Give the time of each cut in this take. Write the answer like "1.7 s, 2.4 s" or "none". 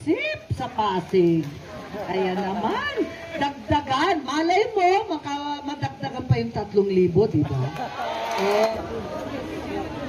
8.7 s